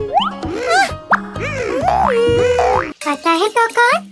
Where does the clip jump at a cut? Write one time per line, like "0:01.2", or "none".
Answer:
0:02.9